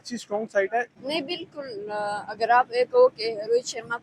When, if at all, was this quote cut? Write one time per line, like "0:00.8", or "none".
0:01.0